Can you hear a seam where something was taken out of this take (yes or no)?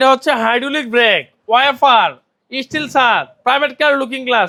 no